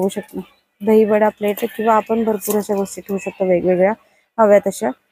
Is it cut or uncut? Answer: uncut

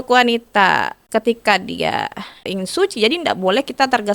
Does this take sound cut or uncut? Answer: cut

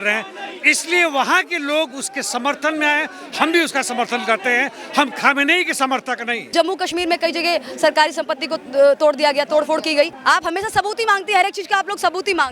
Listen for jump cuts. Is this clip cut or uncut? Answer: cut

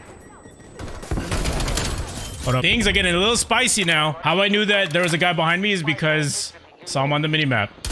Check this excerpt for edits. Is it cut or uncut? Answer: cut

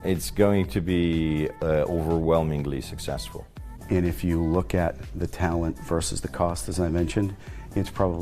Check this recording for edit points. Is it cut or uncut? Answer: cut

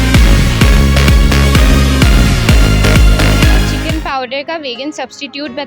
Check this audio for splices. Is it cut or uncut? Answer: cut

